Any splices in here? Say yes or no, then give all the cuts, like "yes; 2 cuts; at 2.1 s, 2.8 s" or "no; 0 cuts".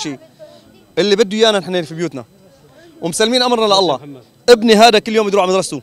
no; 0 cuts